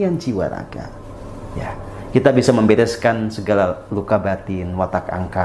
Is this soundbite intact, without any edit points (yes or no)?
yes